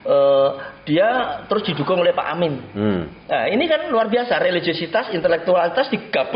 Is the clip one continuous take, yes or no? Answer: yes